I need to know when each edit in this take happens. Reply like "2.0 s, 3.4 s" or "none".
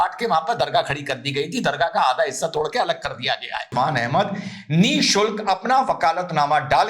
3.7 s